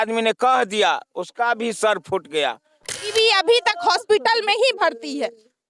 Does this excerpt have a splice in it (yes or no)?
yes